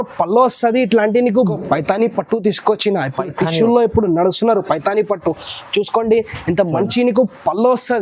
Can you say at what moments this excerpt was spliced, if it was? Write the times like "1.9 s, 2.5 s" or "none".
1.4 s